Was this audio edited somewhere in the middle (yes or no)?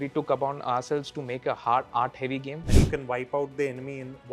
yes